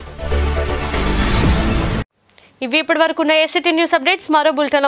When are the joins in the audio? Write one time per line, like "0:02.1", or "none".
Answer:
none